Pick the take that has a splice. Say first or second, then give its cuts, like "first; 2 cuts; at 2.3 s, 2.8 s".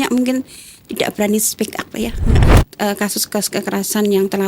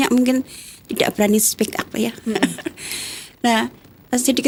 first; 1 cut; at 2.4 s